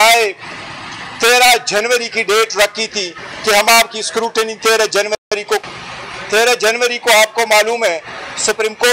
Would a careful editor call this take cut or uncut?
cut